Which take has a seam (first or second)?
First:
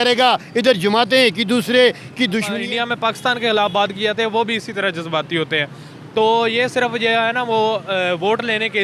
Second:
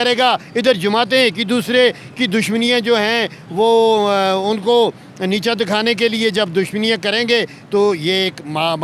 first